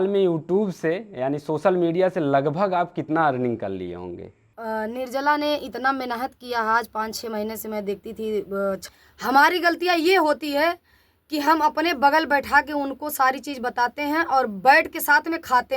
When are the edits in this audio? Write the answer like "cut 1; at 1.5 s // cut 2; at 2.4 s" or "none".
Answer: cut 1; at 4.4 s // cut 2; at 8.9 s